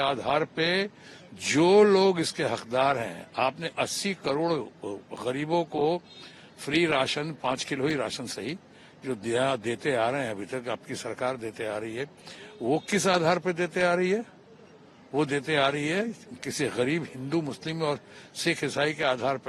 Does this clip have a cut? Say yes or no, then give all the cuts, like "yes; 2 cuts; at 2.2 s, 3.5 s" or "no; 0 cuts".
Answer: no; 0 cuts